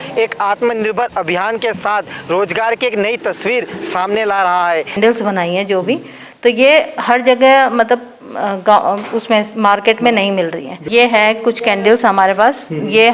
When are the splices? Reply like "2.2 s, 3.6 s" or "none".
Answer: 5.0 s, 10.7 s